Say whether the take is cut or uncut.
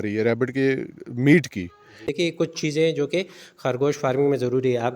cut